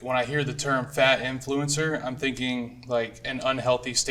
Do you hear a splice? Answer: no; 0 cuts

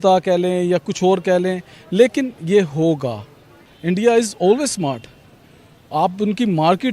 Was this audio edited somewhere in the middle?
yes; 1 cut; at 3.6 s

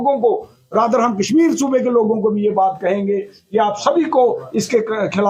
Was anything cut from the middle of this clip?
no; 0 cuts

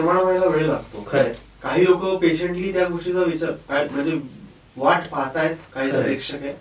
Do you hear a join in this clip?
no; 0 cuts

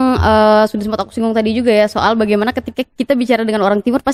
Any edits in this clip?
no; 0 cuts

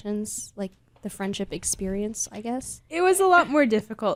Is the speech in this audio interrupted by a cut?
no; 0 cuts

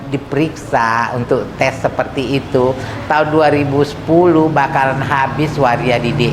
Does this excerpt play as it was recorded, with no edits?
yes; 0 cuts

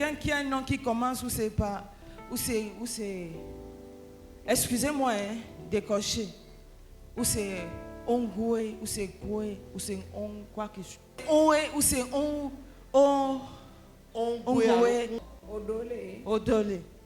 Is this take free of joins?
yes; 0 cuts

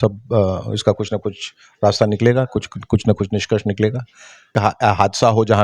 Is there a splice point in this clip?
yes; 1 cut; at 4.6 s

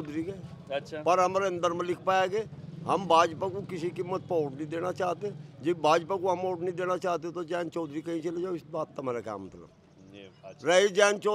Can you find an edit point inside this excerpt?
no; 0 cuts

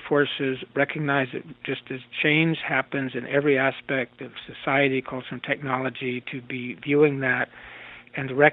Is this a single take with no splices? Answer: yes; 0 cuts

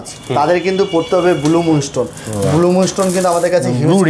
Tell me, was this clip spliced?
no; 0 cuts

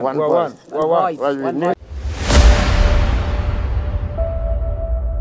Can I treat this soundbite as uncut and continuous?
no; 1 cut; at 1.7 s

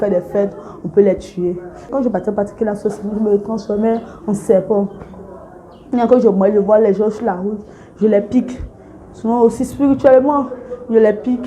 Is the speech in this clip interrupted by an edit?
yes; 1 cut; at 1.9 s

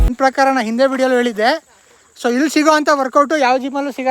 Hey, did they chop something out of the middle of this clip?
no; 0 cuts

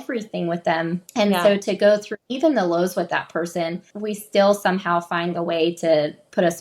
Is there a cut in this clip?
yes; 3 cuts; at 1.0 s, 2.2 s, 4.0 s

